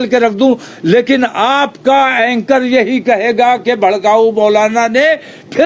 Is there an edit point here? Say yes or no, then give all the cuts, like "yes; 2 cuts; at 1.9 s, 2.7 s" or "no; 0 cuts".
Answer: no; 0 cuts